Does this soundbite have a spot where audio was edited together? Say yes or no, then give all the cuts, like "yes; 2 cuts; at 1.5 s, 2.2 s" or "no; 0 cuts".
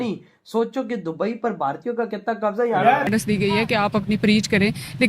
yes; 1 cut; at 3.1 s